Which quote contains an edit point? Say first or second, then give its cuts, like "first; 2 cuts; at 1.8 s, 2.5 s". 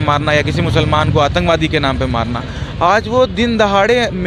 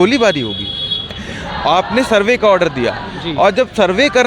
second; 1 cut; at 1.2 s